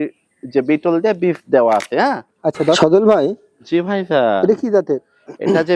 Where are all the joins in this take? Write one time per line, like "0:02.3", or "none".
0:02.8